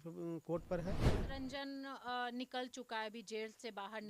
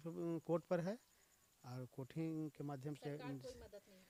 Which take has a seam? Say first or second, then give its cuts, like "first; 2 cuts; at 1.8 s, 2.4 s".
first; 1 cut; at 1.0 s